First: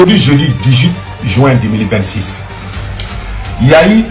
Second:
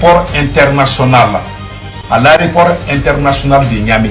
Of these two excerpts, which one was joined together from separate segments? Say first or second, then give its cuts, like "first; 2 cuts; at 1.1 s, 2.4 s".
second; 1 cut; at 2.0 s